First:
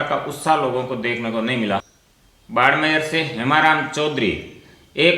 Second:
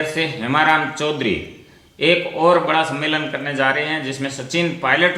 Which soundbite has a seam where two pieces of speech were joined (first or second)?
first